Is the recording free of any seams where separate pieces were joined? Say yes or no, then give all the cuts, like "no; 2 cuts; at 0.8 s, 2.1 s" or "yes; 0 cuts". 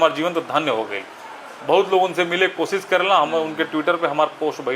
yes; 0 cuts